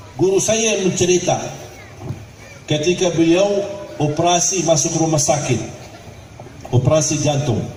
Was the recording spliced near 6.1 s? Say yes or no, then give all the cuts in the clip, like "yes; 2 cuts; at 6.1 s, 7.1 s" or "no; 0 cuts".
no; 0 cuts